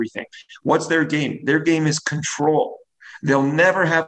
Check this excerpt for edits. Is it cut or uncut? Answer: uncut